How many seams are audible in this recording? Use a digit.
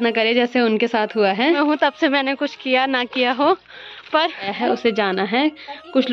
2